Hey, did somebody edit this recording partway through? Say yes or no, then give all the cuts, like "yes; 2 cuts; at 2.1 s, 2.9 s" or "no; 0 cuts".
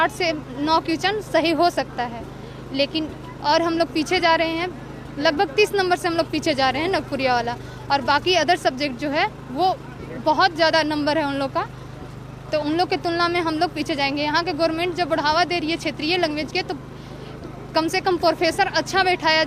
no; 0 cuts